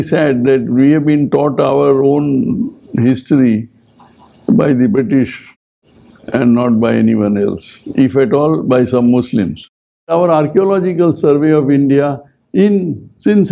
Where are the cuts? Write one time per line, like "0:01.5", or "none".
0:10.1

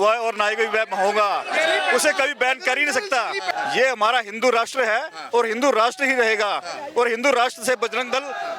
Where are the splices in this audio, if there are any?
0:03.5

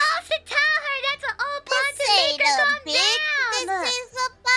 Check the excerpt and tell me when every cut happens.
0:01.2

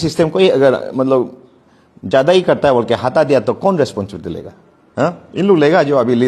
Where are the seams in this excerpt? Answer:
none

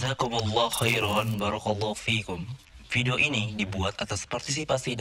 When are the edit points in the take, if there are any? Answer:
none

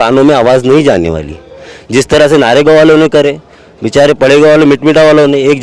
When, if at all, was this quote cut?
none

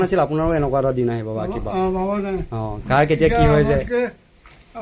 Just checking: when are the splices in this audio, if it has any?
none

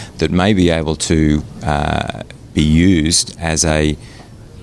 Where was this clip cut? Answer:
none

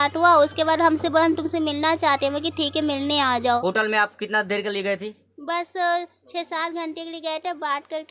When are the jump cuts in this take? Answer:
0:03.6

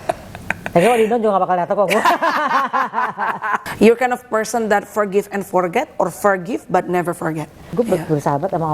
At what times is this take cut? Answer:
0:03.6
0:07.7

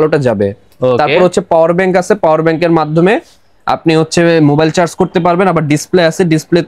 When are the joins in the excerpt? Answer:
none

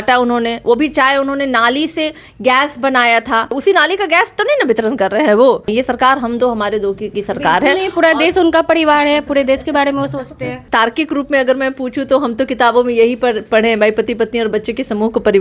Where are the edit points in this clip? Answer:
0:03.6
0:05.7
0:10.6

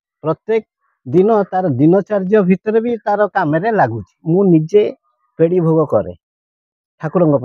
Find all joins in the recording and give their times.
0:04.1

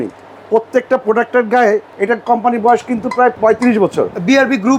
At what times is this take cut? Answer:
0:01.9
0:03.4

